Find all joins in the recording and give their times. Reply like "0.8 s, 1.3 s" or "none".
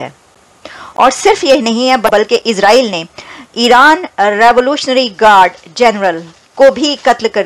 2.0 s